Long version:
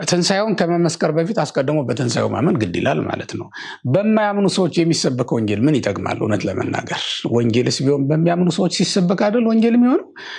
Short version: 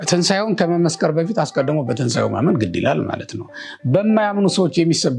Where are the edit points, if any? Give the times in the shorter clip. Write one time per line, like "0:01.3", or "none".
none